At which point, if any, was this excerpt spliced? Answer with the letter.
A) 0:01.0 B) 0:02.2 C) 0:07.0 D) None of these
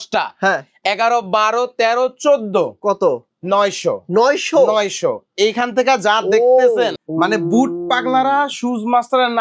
C